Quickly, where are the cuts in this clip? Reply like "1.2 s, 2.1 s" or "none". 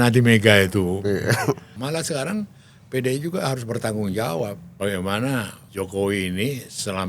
1.7 s, 4.6 s, 5.6 s